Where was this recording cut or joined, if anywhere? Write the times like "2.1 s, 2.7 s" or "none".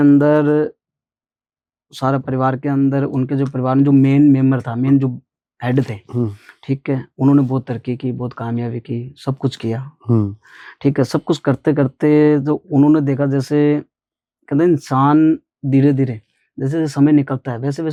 none